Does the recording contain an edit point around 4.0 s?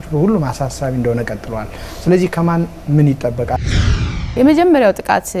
yes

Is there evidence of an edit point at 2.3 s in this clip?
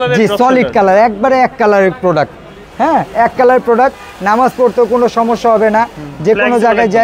no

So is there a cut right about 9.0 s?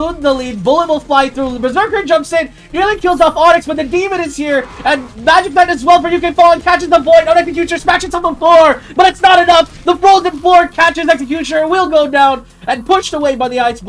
no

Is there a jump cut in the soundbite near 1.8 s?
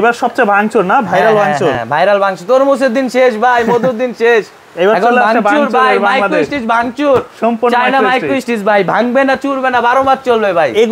no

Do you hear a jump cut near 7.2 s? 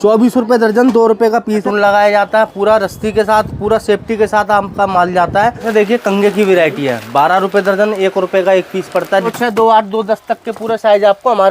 no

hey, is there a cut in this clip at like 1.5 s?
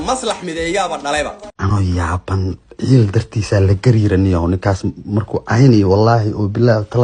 yes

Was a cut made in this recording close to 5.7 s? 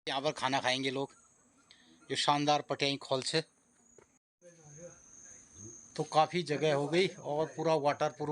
no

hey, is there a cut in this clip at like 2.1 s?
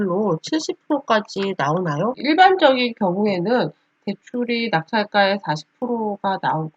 yes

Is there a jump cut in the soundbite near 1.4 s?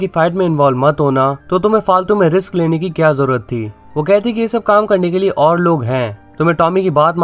yes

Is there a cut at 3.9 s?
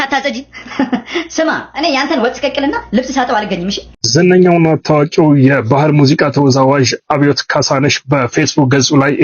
yes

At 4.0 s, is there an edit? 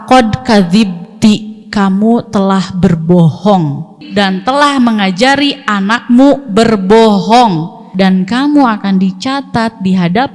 yes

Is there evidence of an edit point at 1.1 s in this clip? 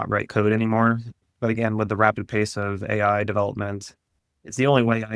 yes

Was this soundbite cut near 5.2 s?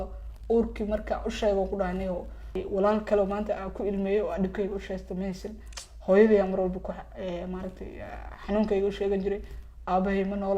no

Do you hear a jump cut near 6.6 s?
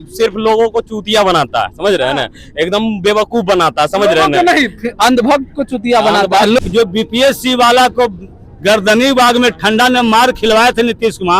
yes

